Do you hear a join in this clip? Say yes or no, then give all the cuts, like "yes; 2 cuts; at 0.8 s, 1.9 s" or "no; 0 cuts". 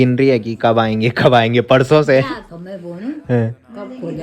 no; 0 cuts